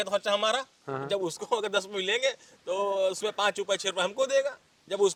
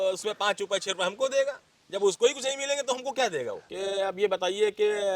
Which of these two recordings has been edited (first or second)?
second